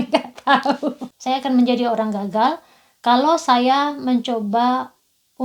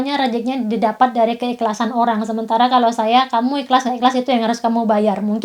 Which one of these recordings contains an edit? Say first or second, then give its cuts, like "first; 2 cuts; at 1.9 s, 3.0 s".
first; 1 cut; at 1.1 s